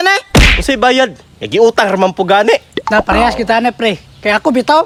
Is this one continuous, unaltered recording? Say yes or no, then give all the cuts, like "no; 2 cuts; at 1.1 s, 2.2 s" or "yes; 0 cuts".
yes; 0 cuts